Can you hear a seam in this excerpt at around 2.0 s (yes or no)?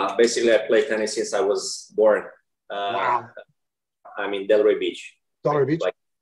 no